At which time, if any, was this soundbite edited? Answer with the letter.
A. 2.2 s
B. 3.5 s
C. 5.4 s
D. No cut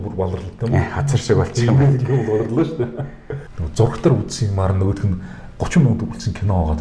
B